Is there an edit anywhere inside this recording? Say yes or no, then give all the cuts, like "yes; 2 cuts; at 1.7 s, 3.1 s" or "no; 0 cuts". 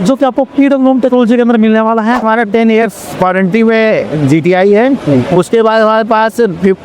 yes; 1 cut; at 2.2 s